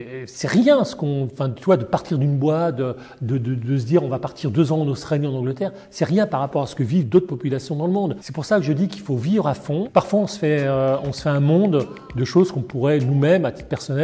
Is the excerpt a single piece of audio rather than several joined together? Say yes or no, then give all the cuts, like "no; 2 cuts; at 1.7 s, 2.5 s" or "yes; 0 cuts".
no; 2 cuts; at 8.3 s, 9.9 s